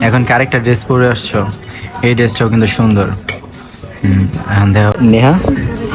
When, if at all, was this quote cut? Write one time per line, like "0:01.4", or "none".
0:04.9